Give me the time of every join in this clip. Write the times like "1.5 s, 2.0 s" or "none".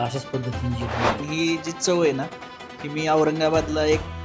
1.2 s